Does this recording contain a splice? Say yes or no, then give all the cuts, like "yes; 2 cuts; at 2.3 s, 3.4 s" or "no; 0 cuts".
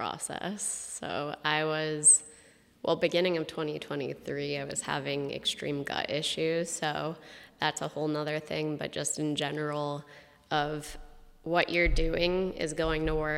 no; 0 cuts